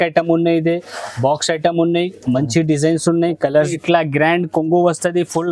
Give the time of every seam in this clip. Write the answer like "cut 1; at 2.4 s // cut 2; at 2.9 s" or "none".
cut 1; at 3.7 s